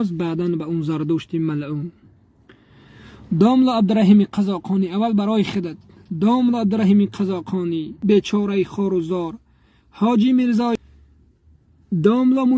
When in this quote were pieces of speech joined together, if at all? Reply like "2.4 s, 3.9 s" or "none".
none

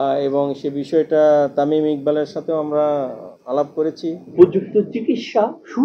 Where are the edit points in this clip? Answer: 4.2 s

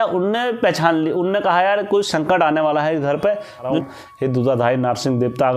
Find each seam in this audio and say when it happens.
3.7 s

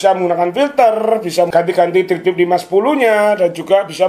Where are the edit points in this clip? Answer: 1.5 s

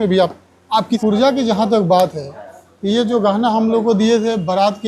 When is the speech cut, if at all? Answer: 1.0 s

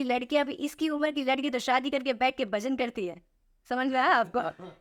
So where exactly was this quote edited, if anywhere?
none

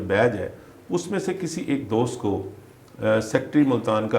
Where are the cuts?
none

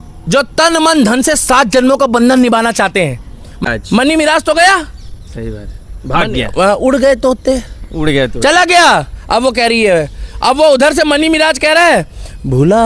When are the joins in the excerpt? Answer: 3.6 s

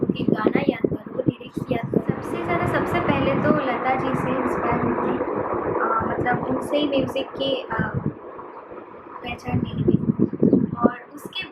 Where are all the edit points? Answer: 2.2 s

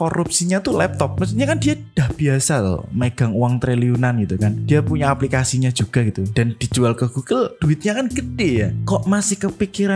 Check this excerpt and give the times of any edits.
none

